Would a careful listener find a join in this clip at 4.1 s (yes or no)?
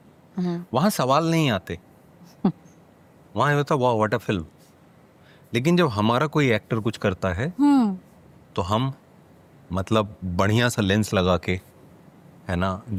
no